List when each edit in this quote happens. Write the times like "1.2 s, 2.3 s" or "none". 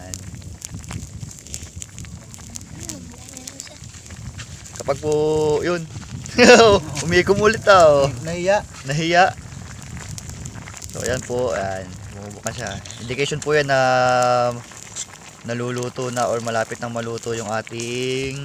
none